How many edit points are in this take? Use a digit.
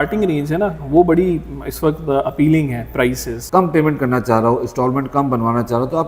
1